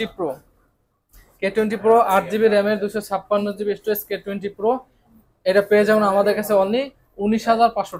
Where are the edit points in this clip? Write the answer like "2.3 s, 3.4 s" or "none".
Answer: none